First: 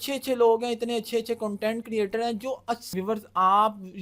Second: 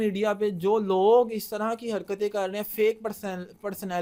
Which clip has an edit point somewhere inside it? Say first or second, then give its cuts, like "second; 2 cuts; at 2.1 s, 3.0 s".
first; 1 cut; at 2.9 s